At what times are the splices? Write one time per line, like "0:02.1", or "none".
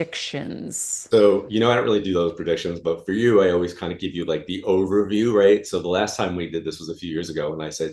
none

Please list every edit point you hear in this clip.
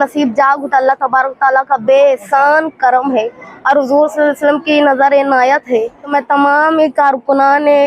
0:06.1

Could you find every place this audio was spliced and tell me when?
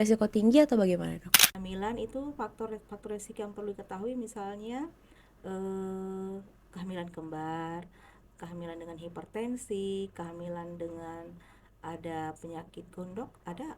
0:01.4

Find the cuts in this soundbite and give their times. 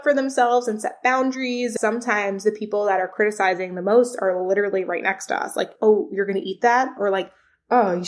0:01.7
0:05.6
0:06.9

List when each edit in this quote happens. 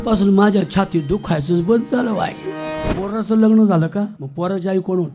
0:02.9
0:04.2

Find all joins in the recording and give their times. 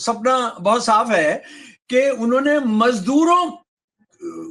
none

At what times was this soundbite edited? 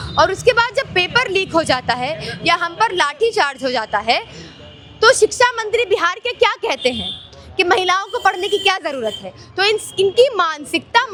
none

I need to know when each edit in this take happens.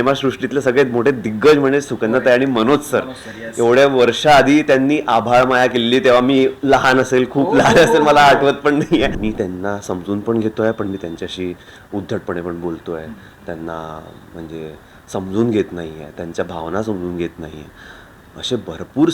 0:09.2

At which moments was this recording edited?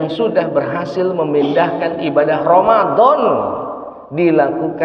none

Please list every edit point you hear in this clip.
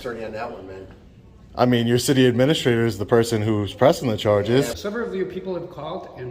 0:04.8

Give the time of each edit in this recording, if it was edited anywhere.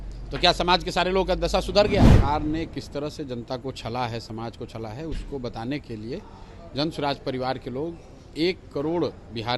0:02.1

